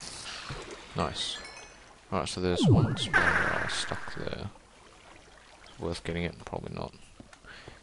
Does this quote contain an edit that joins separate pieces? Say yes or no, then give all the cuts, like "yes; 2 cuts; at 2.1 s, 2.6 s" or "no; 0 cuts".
no; 0 cuts